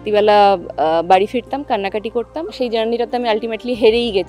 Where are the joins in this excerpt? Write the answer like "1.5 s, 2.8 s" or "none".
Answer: 2.5 s